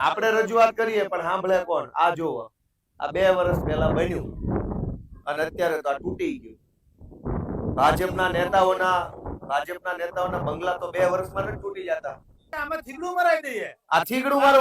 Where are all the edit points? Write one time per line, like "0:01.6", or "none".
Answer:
0:12.6